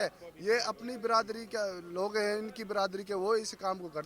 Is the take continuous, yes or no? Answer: yes